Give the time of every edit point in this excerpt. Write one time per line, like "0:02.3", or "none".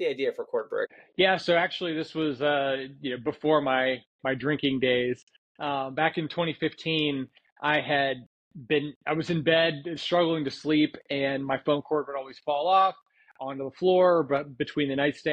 0:01.0